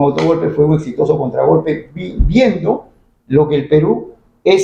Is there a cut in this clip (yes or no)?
no